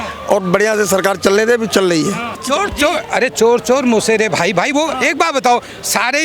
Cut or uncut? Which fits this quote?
cut